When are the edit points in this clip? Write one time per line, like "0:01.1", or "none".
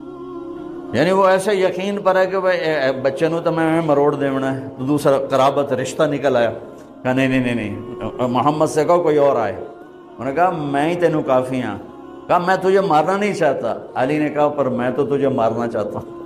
0:00.9